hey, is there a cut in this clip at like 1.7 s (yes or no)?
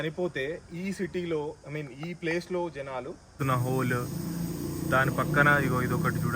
no